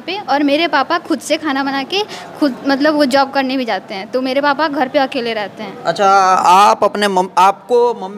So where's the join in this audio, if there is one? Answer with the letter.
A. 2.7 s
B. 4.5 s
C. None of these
C